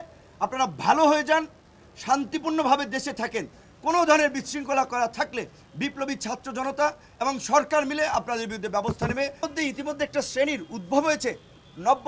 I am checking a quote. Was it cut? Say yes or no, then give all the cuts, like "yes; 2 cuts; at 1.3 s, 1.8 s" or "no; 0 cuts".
yes; 1 cut; at 9.4 s